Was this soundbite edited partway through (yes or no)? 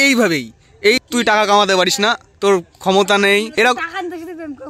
yes